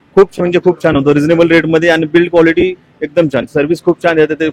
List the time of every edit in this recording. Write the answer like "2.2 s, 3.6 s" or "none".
none